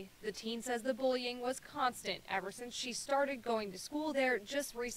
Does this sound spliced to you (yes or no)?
yes